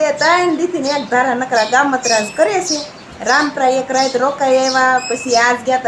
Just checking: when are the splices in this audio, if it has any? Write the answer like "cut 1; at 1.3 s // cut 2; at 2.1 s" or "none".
none